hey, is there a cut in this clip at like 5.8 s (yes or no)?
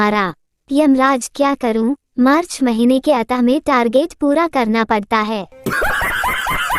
yes